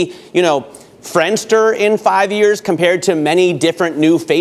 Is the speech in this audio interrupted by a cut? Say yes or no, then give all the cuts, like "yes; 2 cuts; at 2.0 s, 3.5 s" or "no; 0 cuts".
no; 0 cuts